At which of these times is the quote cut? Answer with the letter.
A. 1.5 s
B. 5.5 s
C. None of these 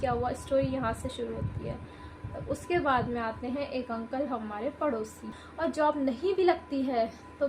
B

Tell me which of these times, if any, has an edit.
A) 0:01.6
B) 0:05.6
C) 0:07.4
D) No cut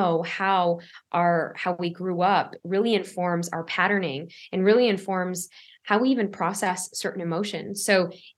D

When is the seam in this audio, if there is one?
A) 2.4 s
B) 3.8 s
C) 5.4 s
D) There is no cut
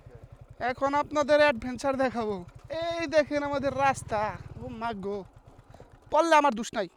D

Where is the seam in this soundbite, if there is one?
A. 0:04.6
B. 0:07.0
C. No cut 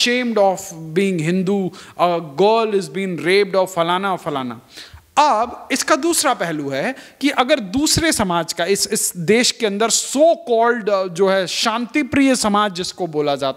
C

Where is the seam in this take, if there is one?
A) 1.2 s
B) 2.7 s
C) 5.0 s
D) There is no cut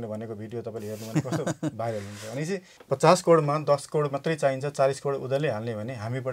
B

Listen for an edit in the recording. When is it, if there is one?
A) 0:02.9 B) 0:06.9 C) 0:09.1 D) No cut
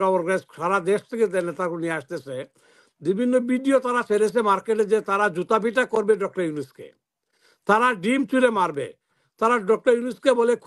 D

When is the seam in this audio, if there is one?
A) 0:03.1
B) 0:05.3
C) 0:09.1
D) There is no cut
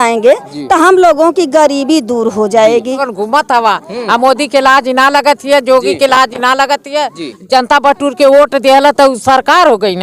A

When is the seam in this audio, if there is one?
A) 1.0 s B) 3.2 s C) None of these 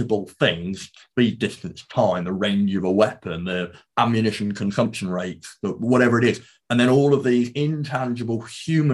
C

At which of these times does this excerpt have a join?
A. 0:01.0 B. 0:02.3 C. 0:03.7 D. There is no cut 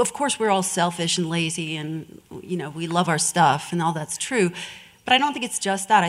C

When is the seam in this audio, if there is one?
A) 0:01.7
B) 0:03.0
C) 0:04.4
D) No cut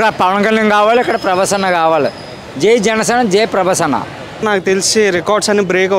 C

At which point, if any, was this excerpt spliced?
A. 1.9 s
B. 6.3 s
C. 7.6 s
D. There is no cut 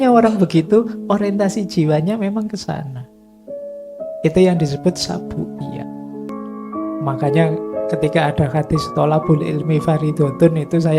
B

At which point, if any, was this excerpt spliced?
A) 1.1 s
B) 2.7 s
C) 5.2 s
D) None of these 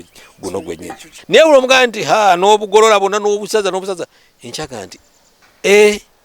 A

